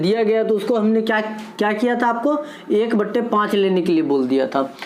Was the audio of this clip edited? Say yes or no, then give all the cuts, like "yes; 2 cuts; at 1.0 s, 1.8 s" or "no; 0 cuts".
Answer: no; 0 cuts